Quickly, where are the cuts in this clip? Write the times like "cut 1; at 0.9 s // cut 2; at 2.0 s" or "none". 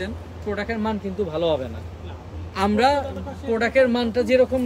none